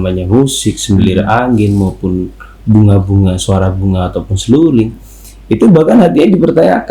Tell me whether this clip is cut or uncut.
uncut